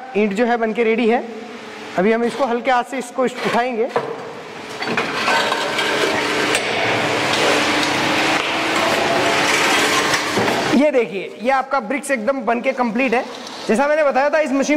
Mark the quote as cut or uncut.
uncut